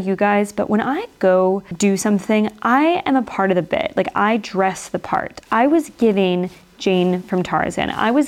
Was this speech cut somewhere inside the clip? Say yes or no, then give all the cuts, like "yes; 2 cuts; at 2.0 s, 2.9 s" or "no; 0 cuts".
yes; 1 cut; at 1.7 s